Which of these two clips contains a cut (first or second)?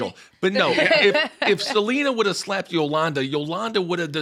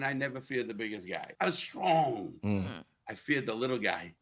second